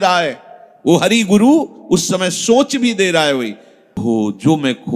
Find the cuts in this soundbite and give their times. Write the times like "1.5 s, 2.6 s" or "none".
4.0 s